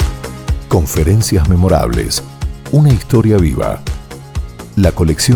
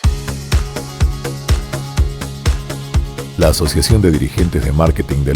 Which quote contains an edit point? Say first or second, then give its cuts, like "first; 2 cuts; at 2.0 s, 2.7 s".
second; 1 cut; at 2.9 s